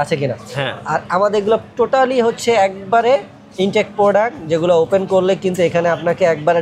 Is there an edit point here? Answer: no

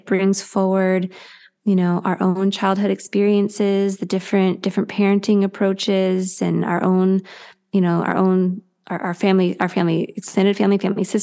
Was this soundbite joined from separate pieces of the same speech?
no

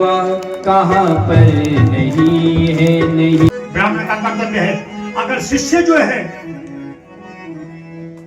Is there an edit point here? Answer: yes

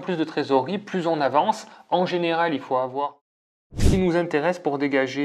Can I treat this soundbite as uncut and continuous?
no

